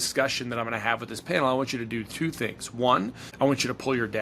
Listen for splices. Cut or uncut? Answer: cut